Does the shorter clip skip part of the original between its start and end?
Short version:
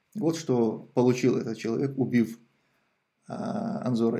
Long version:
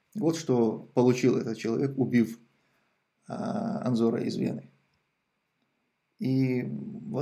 no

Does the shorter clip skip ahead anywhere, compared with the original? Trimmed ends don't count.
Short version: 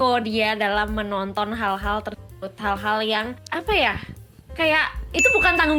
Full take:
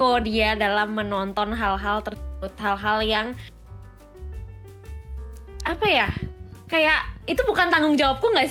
yes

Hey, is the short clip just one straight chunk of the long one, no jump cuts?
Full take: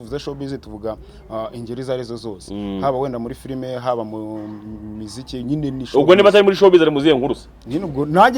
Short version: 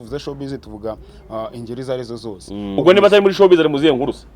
no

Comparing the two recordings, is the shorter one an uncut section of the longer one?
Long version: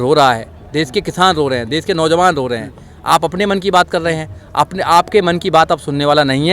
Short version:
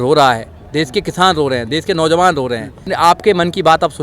no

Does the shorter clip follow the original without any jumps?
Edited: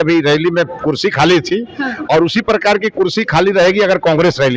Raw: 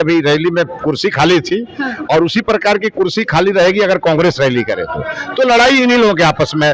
yes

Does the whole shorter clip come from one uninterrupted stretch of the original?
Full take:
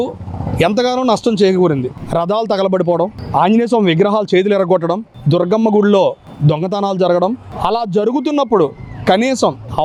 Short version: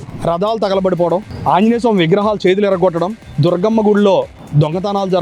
yes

